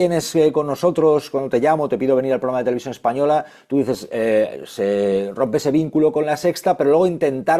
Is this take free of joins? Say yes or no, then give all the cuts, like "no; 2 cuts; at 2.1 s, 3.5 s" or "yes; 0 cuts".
yes; 0 cuts